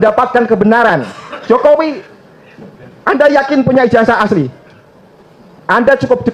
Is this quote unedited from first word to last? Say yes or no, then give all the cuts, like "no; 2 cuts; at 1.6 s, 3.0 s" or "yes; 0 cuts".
yes; 0 cuts